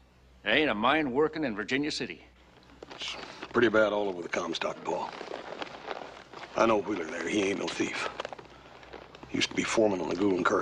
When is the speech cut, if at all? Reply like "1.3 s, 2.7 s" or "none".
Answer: none